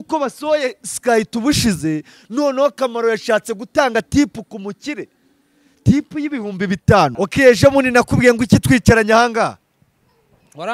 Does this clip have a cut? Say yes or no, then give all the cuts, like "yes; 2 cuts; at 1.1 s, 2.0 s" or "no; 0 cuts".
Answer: yes; 1 cut; at 7.1 s